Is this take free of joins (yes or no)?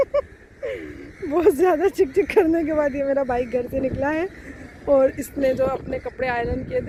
yes